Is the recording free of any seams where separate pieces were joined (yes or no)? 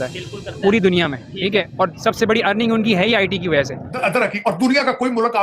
no